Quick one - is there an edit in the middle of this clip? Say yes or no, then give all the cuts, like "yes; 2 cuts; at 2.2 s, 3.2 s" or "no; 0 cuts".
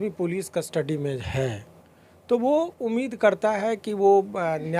no; 0 cuts